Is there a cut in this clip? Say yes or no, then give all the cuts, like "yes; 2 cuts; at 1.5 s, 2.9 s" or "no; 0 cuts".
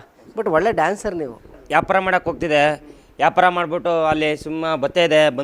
no; 0 cuts